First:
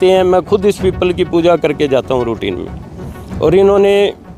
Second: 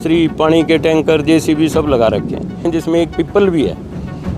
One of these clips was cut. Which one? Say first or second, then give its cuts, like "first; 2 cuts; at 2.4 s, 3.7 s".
second; 1 cut; at 2.7 s